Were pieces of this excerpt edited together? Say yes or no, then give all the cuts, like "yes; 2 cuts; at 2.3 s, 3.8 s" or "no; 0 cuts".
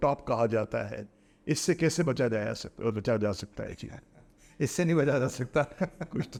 no; 0 cuts